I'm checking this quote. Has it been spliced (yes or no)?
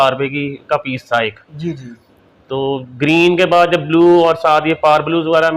no